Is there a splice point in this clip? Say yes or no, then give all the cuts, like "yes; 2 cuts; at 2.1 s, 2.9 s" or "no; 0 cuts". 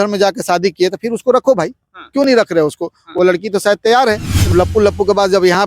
yes; 1 cut; at 4.5 s